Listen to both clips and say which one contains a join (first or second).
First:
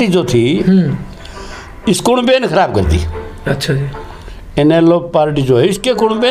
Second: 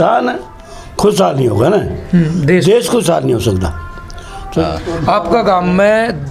second